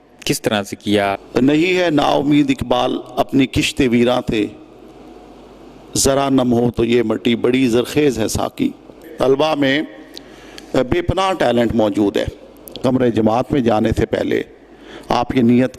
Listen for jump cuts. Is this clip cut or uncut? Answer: cut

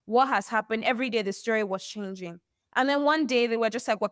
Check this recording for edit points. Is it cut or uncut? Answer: uncut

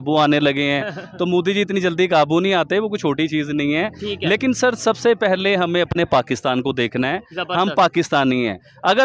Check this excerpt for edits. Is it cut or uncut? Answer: uncut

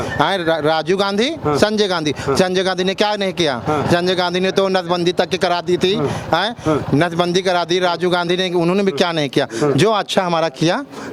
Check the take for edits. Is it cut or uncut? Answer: uncut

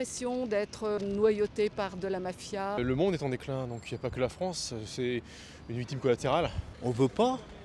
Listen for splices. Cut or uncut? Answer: cut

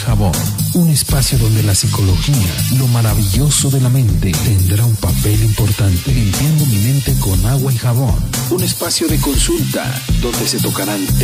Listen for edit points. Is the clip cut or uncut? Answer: uncut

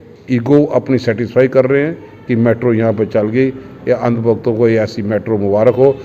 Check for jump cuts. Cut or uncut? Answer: uncut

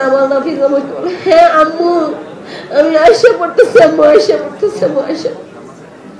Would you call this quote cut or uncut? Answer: uncut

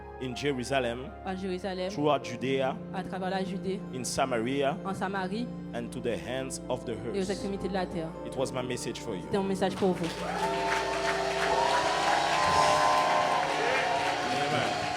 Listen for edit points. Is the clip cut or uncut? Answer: uncut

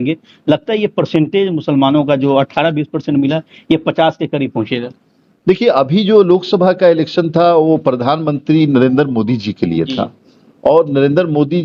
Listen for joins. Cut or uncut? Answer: uncut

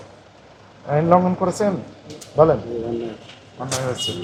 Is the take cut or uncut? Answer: uncut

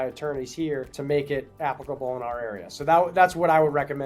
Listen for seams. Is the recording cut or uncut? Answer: cut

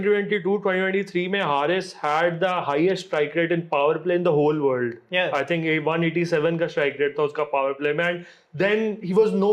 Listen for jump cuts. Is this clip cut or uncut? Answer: uncut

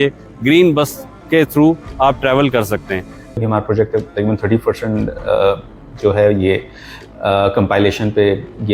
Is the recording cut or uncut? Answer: cut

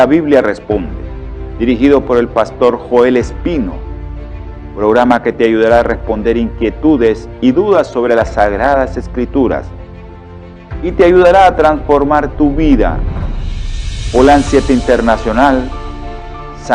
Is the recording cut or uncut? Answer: uncut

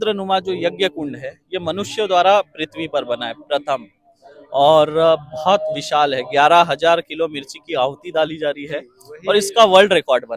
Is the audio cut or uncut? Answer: uncut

